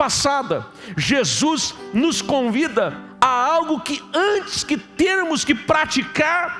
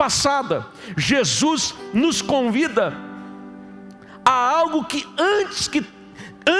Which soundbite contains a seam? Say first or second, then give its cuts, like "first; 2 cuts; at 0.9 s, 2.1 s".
first; 2 cuts; at 3.0 s, 4.9 s